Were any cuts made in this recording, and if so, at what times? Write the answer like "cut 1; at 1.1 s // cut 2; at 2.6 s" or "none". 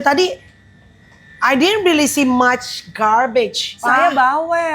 cut 1; at 3.7 s